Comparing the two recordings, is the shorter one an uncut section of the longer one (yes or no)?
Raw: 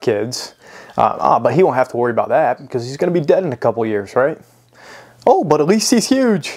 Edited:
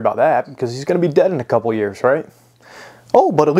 yes